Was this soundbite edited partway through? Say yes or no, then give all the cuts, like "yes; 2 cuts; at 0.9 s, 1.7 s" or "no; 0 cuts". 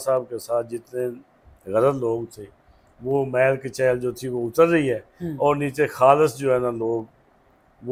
no; 0 cuts